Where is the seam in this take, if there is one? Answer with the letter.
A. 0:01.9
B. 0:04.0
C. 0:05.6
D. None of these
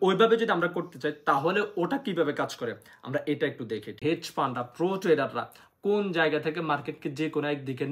B